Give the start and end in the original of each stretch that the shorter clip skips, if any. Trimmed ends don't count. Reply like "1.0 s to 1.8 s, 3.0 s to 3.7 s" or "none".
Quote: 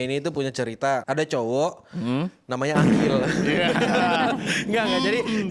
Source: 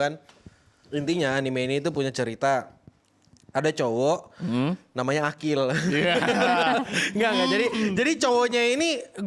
2.6 s to 3.5 s